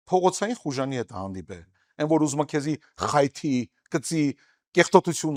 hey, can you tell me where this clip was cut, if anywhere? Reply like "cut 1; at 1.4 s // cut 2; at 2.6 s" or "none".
none